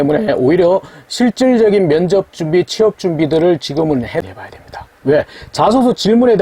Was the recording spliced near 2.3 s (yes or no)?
no